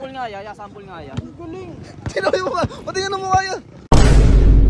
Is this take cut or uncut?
cut